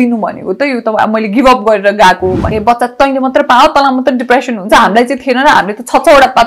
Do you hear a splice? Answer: yes; 1 cut; at 2.5 s

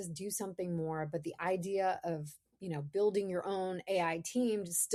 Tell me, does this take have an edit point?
no; 0 cuts

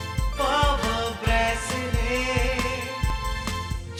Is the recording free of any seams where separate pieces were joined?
yes; 0 cuts

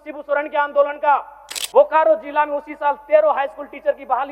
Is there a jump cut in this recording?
yes; 1 cut; at 1.5 s

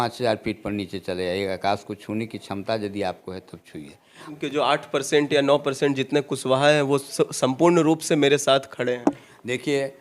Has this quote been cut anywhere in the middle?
yes; 1 cut; at 4.3 s

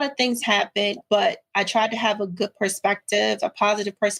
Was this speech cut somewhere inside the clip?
yes; 1 cut; at 1.0 s

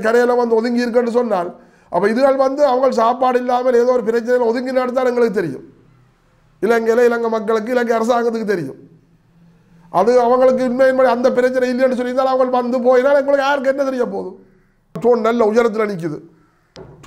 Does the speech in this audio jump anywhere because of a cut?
yes; 1 cut; at 15.0 s

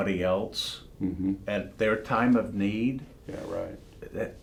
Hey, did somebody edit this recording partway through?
no; 0 cuts

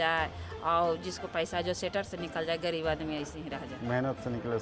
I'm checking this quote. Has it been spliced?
no; 0 cuts

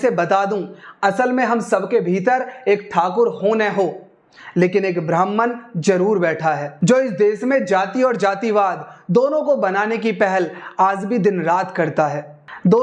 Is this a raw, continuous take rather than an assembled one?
yes; 0 cuts

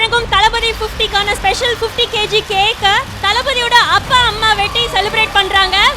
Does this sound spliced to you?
yes; 1 cut; at 4.4 s

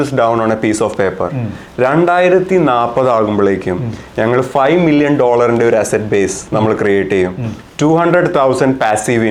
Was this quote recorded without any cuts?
yes; 0 cuts

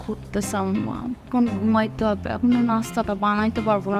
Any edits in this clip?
no; 0 cuts

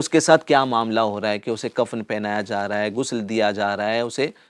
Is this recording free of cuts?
yes; 0 cuts

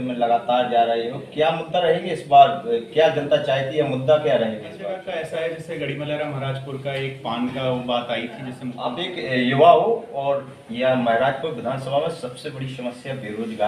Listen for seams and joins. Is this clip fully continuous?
no; 2 cuts; at 4.9 s, 8.9 s

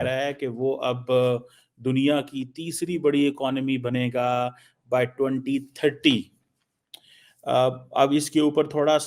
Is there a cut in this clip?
no; 0 cuts

